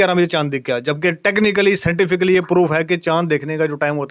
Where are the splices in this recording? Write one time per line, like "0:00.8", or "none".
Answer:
none